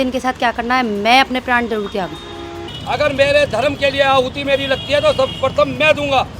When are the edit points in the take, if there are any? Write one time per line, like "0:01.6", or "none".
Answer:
0:02.7